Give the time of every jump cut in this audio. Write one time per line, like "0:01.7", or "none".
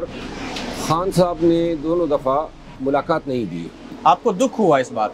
0:02.8
0:03.9